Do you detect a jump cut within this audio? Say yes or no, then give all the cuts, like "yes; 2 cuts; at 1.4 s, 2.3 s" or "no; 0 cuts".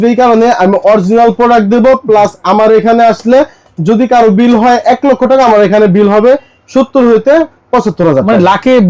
no; 0 cuts